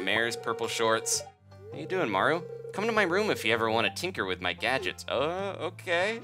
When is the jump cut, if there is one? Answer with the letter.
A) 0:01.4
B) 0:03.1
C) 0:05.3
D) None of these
A